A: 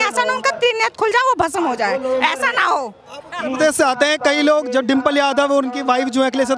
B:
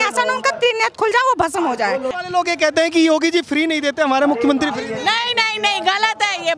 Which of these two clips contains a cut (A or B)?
B